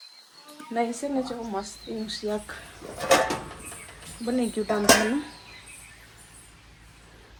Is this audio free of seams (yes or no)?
yes